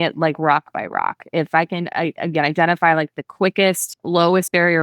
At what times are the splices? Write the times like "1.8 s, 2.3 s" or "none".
3.9 s